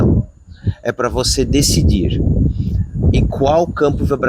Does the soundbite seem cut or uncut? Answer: uncut